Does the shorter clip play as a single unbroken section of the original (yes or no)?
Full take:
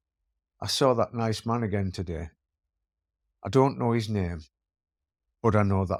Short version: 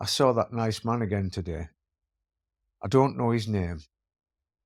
yes